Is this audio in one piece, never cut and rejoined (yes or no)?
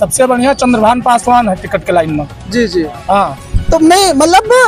yes